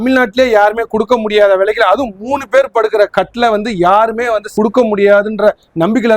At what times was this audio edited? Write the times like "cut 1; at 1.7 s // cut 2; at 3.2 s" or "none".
cut 1; at 4.5 s